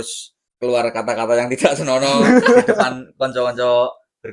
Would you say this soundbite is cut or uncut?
uncut